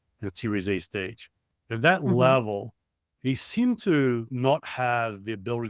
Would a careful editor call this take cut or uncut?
cut